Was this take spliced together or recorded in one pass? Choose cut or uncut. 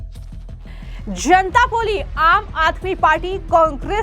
cut